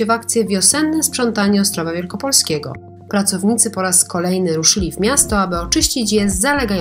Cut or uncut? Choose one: uncut